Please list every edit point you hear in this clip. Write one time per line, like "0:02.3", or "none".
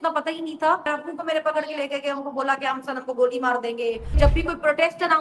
0:00.9
0:04.1

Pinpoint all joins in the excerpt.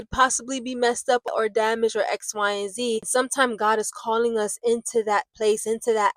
0:01.3
0:03.1

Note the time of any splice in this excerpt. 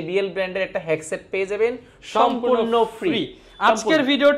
none

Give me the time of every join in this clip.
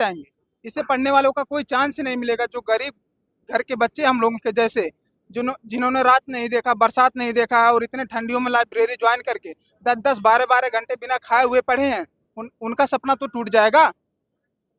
none

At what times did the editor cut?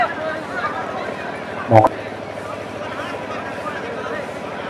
0:01.8

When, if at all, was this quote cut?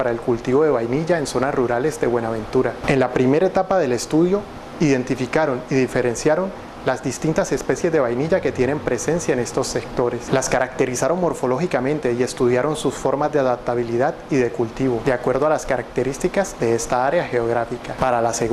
0:12.7

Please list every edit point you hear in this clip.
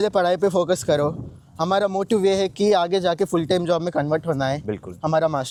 none

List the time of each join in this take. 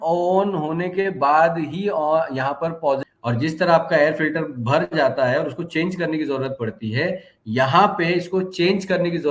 0:03.1

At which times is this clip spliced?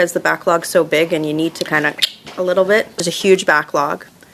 0:02.9

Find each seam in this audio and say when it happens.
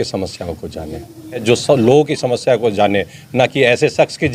0:01.4

